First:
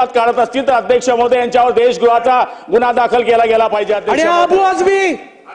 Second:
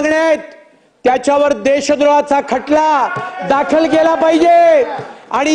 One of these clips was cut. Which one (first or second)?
first